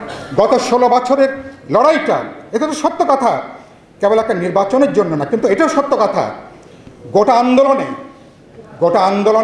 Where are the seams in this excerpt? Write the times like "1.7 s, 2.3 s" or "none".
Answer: none